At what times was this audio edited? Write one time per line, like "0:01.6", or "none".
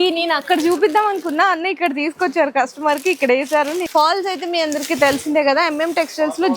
0:03.8